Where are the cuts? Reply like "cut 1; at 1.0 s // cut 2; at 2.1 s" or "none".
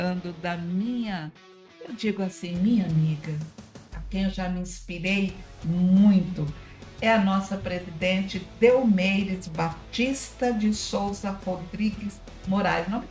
none